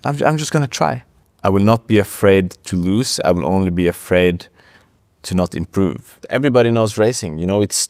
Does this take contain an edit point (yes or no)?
yes